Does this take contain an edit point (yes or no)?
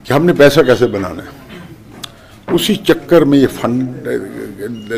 no